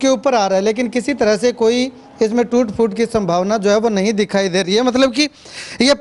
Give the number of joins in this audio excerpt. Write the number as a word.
zero